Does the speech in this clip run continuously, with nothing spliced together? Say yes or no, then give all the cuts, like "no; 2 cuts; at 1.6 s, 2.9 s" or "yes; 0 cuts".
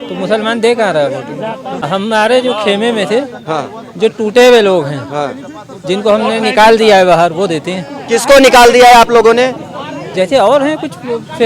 no; 1 cut; at 1.9 s